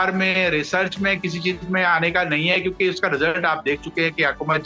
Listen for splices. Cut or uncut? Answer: uncut